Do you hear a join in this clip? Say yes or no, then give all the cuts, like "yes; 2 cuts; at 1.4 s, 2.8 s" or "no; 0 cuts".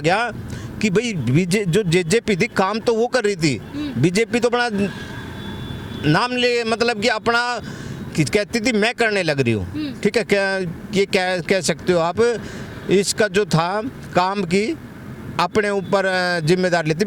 no; 0 cuts